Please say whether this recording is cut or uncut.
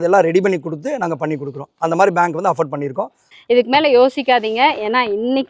cut